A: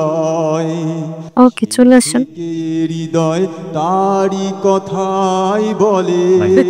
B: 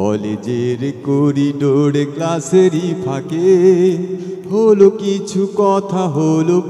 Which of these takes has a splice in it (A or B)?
A